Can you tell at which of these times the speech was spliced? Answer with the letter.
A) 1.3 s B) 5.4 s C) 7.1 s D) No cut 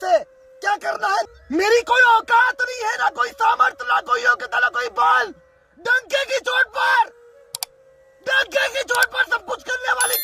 A